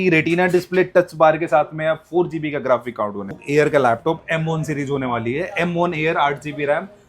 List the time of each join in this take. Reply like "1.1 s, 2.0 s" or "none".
3.4 s

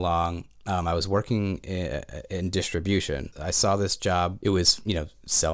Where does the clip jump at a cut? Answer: 3.3 s, 4.4 s

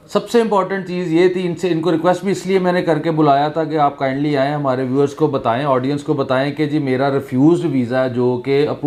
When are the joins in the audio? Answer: none

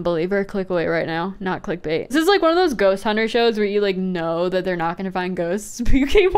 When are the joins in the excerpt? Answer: 2.1 s

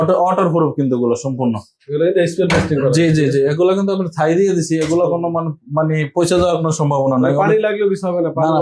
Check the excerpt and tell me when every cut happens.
none

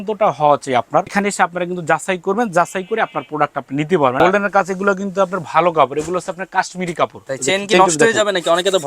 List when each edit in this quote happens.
1.1 s, 4.2 s, 7.3 s

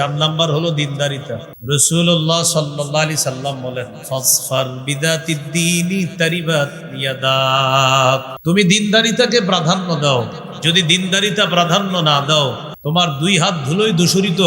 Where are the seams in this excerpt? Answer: 1.5 s, 8.3 s, 12.7 s

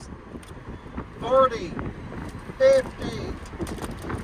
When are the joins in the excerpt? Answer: none

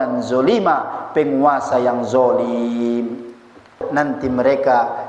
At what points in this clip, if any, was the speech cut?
3.8 s

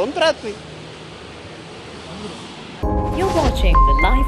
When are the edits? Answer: 2.8 s

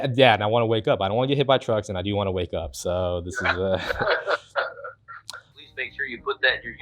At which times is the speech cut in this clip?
5.5 s

